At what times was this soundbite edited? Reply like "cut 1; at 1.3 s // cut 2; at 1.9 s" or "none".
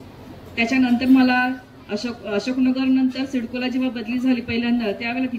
none

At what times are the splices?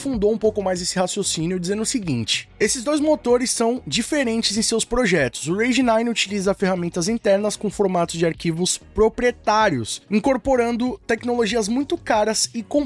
none

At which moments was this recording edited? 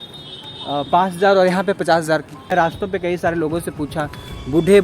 cut 1; at 2.5 s

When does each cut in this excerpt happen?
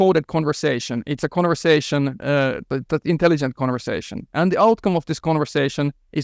none

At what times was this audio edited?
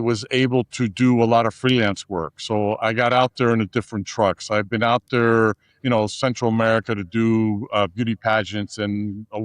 none

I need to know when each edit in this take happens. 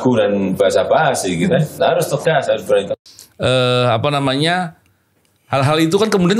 none

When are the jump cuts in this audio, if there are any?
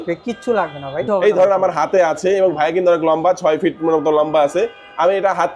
cut 1; at 0.9 s

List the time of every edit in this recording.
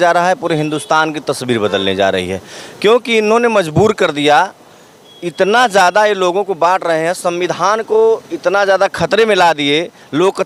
none

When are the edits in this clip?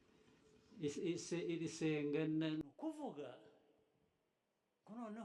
cut 1; at 2.6 s

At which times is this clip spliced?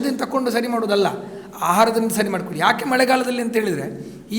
none

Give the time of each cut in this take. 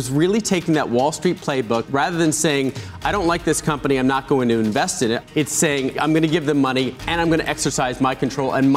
cut 1; at 1.9 s // cut 2; at 5.5 s

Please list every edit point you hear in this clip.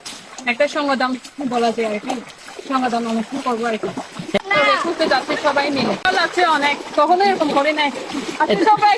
cut 1; at 4.4 s // cut 2; at 6.0 s

